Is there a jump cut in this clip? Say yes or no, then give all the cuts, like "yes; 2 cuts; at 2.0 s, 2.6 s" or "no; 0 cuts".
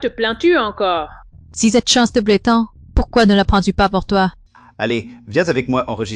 yes; 1 cut; at 4.4 s